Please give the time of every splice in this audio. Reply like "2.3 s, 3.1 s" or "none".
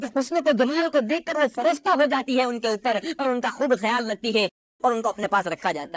4.6 s